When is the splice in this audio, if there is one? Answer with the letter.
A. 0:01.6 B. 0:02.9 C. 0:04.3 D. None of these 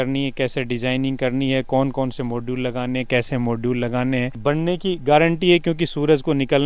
C